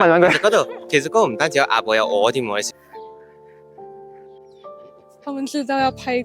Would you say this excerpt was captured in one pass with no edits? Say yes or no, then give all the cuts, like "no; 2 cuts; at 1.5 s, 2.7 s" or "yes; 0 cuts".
no; 1 cut; at 2.7 s